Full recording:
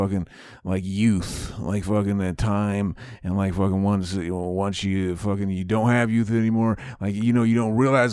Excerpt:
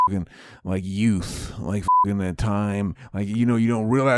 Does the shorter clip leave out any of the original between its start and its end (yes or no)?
yes